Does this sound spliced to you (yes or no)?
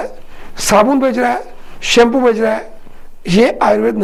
no